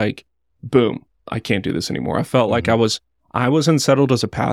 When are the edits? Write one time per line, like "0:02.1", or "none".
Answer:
0:01.3